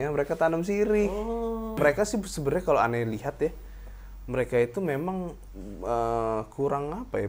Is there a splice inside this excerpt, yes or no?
yes